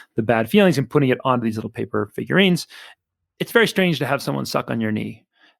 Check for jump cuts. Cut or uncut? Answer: cut